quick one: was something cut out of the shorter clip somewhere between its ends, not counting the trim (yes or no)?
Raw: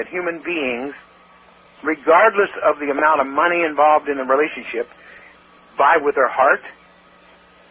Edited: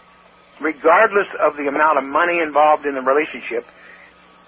no